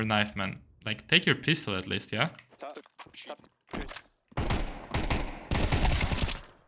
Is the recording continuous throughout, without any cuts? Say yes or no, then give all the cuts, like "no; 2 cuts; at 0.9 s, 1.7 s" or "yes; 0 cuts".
yes; 0 cuts